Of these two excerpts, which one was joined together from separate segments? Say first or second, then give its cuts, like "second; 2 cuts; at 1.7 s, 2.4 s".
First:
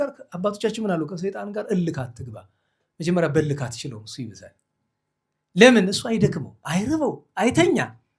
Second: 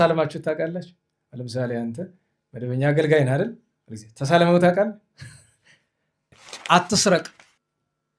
second; 1 cut; at 6.4 s